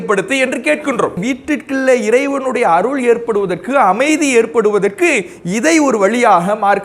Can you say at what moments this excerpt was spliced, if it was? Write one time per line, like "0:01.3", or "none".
0:01.2